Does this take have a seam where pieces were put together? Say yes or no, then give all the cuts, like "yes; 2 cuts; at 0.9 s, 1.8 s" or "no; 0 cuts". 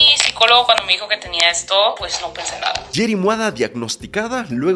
no; 0 cuts